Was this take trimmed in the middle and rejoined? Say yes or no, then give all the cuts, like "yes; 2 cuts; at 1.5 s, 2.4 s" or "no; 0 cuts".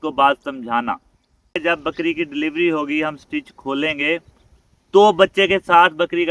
yes; 1 cut; at 1.5 s